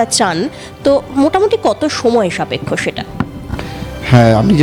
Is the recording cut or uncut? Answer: uncut